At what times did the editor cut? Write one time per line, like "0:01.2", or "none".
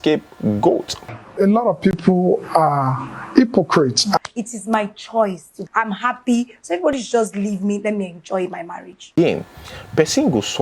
0:01.2
0:04.2
0:09.1